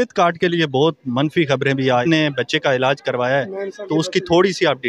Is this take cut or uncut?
cut